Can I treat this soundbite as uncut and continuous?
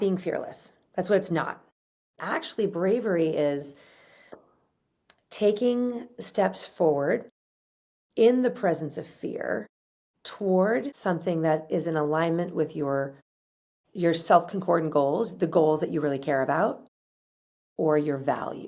no; 1 cut; at 2.2 s

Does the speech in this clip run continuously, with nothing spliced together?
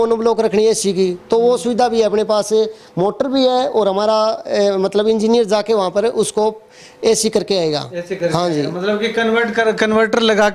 yes; 0 cuts

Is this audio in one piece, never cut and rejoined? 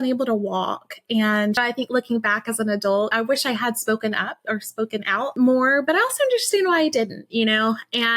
no; 3 cuts; at 1.6 s, 3.1 s, 5.3 s

